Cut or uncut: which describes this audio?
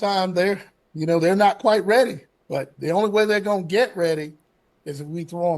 uncut